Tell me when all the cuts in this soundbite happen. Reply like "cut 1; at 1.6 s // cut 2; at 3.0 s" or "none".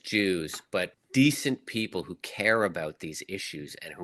cut 1; at 1.0 s